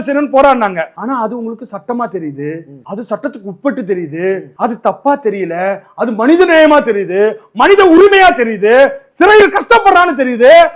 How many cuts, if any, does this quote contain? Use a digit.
3